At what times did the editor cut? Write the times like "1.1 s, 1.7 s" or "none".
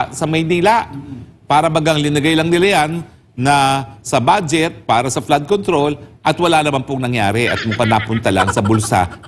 5.4 s